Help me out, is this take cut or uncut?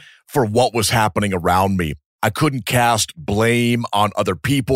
cut